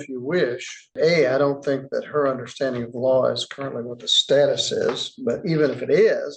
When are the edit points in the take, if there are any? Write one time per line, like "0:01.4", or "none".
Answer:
0:00.9